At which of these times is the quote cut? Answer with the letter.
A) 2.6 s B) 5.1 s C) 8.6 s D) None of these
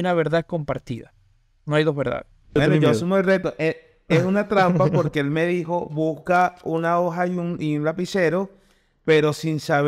A